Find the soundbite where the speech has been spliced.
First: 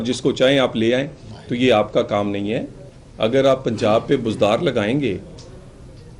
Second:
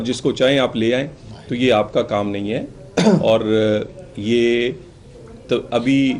first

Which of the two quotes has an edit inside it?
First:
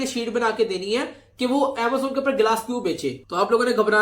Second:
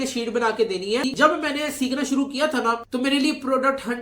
second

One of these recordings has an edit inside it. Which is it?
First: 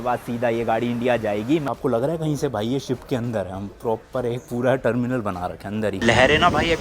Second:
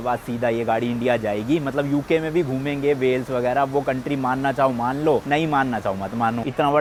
first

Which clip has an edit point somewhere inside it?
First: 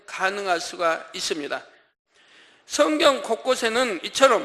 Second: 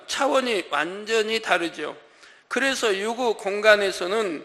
first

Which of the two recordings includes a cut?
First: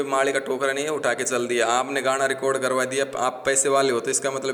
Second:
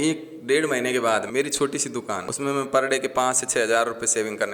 second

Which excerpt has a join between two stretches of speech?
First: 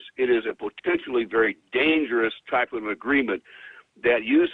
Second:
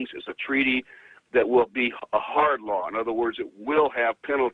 second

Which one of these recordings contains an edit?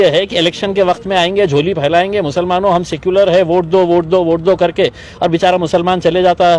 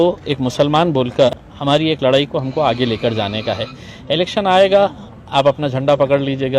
second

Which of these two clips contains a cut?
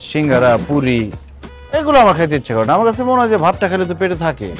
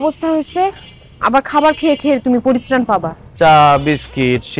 second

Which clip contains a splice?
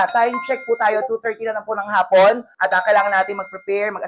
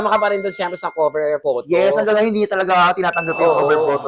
first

